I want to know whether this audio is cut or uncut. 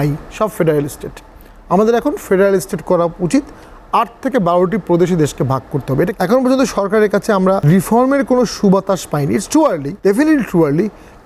cut